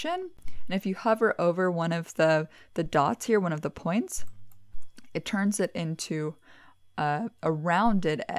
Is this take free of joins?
yes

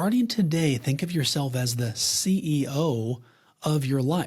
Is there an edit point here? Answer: no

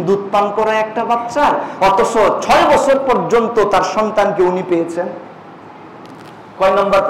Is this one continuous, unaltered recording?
yes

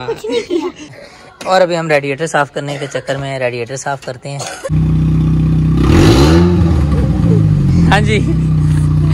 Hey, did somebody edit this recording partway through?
yes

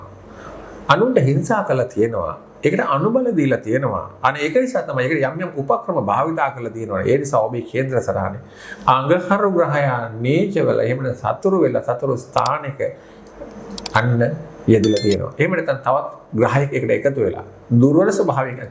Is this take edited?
no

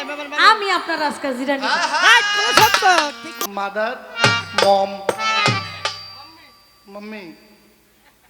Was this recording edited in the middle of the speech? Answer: yes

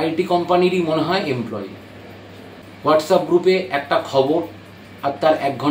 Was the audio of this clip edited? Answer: yes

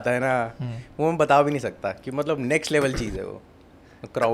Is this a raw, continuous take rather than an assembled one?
yes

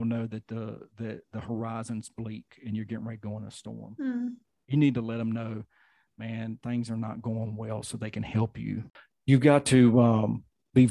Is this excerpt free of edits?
yes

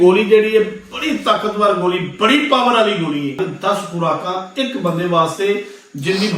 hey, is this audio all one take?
no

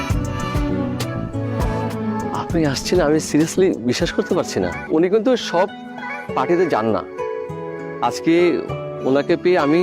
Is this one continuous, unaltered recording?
no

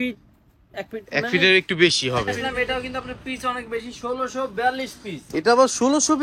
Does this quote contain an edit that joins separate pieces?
yes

